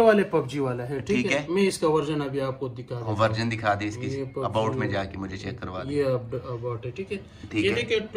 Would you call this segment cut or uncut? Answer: uncut